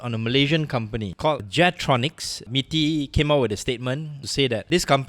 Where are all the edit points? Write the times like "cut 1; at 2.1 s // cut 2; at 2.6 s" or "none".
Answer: cut 1; at 1.2 s // cut 2; at 2.4 s // cut 3; at 4.2 s

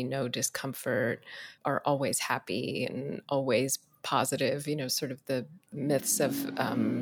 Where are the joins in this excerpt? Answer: cut 1; at 1.4 s // cut 2; at 5.7 s

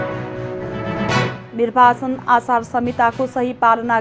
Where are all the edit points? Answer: cut 1; at 1.2 s

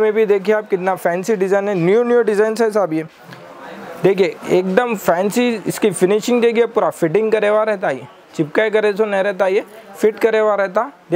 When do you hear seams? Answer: none

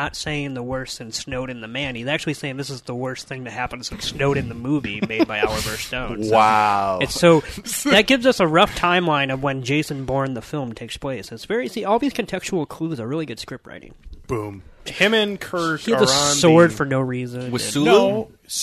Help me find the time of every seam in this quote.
cut 1; at 7.6 s // cut 2; at 14.9 s

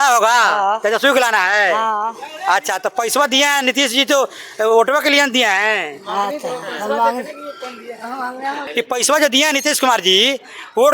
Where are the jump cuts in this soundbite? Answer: cut 1; at 8.6 s

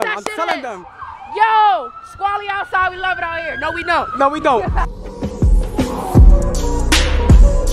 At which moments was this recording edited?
cut 1; at 4.6 s

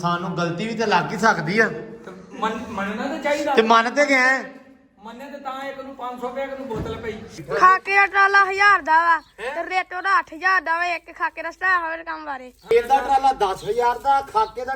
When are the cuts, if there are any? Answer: cut 1; at 7.4 s // cut 2; at 12.7 s

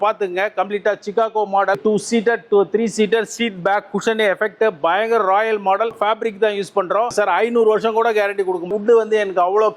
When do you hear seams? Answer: cut 1; at 1.8 s // cut 2; at 5.9 s // cut 3; at 7.1 s // cut 4; at 8.7 s

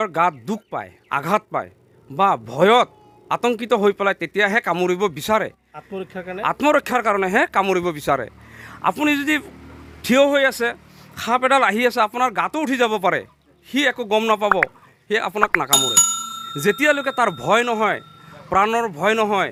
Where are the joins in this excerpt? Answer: none

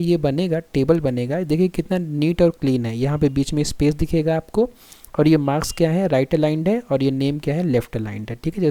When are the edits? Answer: none

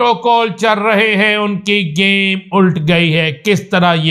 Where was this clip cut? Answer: none

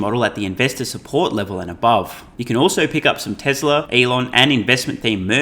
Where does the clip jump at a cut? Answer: cut 1; at 2.3 s // cut 2; at 3.9 s

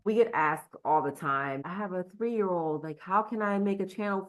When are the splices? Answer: cut 1; at 1.6 s

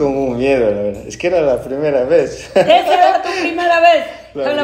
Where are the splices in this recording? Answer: none

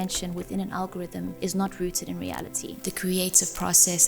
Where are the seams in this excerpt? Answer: cut 1; at 1.3 s // cut 2; at 2.7 s

